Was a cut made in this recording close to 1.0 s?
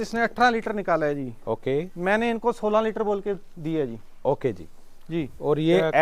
no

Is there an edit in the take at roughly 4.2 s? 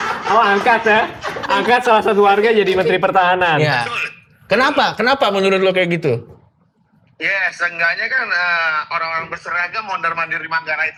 no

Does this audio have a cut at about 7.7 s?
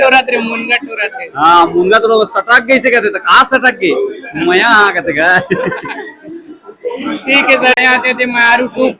yes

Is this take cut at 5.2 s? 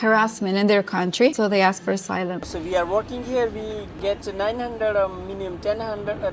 no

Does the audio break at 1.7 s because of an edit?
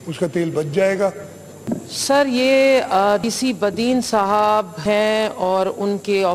yes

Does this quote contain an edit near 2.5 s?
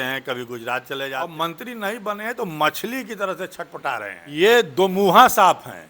no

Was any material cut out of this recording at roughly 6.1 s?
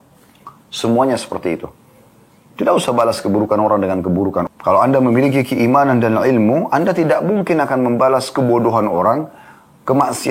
no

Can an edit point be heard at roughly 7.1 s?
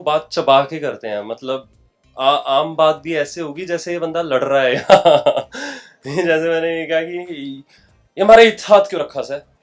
no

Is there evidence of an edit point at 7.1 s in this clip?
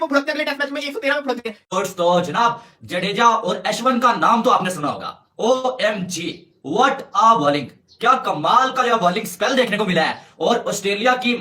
no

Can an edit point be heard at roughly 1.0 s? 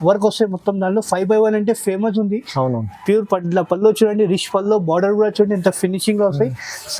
no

